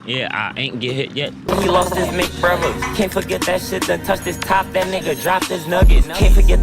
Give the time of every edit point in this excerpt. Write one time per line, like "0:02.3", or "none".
0:01.4